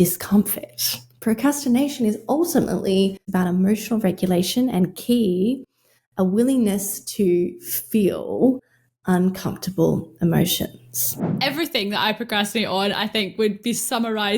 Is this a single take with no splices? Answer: no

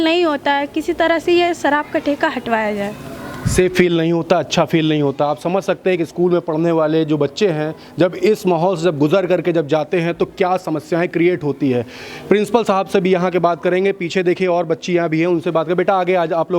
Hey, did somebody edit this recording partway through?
no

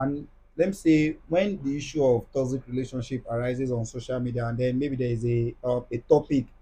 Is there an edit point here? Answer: no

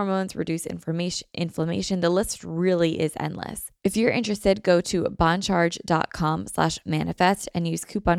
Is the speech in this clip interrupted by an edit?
yes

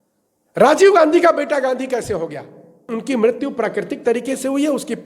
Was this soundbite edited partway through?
yes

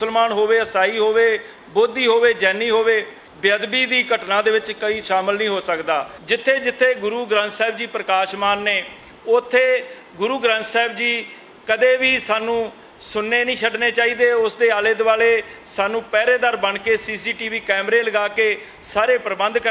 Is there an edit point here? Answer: yes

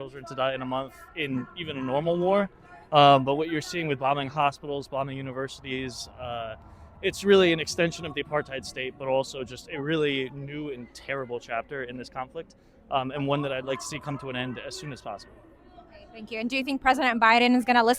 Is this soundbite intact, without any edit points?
yes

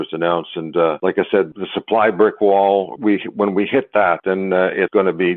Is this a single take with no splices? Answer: no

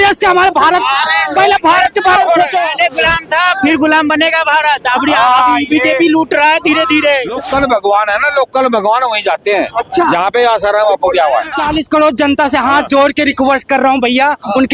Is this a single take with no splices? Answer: no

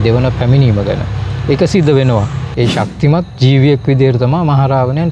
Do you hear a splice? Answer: yes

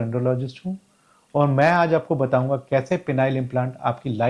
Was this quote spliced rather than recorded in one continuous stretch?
no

